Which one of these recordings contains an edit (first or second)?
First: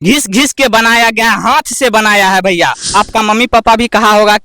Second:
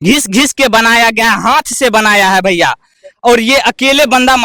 first